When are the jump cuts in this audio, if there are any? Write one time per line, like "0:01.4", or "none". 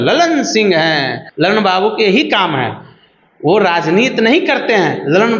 0:01.2